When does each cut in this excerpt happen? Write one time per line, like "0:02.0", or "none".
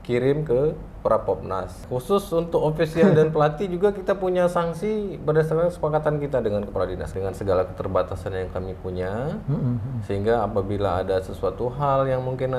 0:01.8
0:07.0